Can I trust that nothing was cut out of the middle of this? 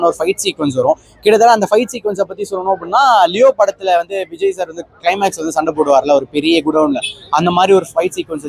yes; 0 cuts

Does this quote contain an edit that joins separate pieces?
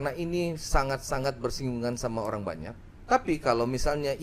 yes; 1 cut; at 2.8 s

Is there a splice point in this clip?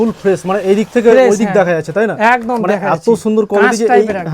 no; 0 cuts

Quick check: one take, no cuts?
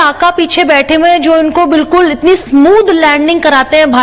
yes; 0 cuts

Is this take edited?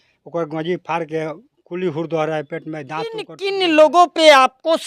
yes; 1 cut; at 3.4 s

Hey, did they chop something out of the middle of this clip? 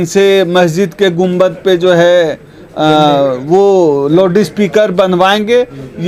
no; 0 cuts

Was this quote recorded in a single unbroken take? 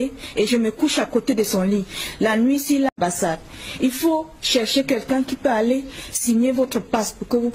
no; 1 cut; at 2.9 s

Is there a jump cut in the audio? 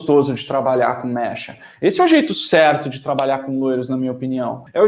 no; 0 cuts

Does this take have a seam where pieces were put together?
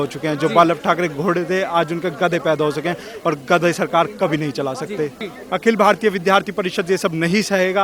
yes; 1 cut; at 5.1 s

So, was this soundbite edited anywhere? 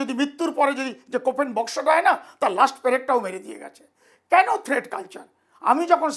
no; 0 cuts

